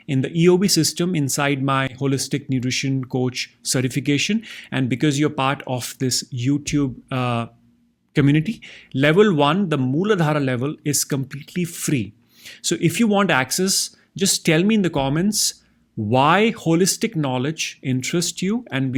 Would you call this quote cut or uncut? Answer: uncut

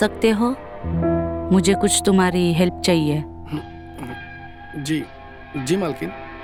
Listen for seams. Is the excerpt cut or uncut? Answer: uncut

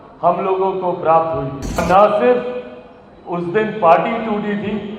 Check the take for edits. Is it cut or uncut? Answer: cut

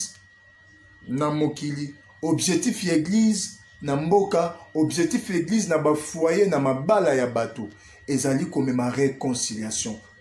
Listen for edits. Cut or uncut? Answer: uncut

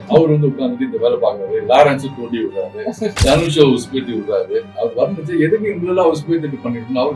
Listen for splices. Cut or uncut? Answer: cut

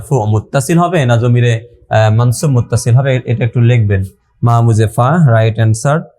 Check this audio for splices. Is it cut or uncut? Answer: uncut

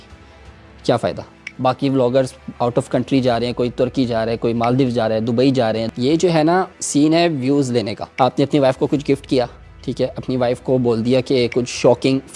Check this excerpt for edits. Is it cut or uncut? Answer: cut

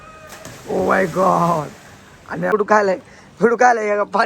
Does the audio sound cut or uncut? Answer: cut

